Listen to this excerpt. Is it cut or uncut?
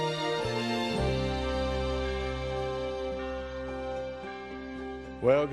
uncut